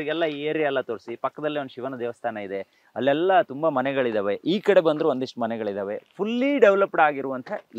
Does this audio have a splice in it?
no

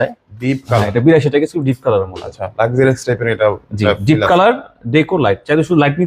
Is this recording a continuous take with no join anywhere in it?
yes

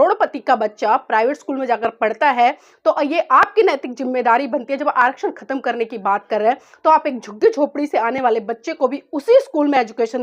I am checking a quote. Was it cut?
no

